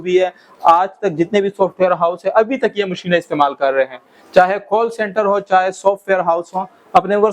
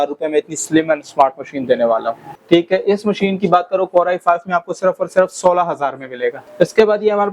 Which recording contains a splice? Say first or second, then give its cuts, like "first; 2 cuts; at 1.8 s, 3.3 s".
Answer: second; 2 cuts; at 2.3 s, 6.4 s